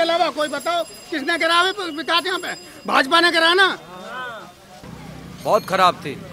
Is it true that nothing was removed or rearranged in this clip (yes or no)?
no